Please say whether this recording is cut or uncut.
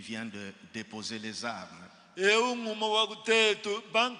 uncut